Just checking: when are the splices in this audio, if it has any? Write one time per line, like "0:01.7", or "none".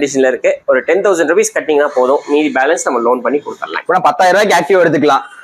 none